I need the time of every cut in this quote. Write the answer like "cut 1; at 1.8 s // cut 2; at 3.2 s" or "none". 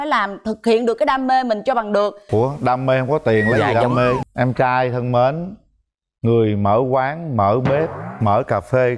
cut 1; at 4.2 s